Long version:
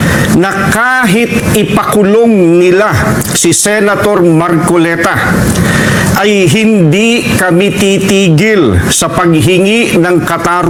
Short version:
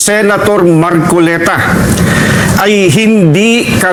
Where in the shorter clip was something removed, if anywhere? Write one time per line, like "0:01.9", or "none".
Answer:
none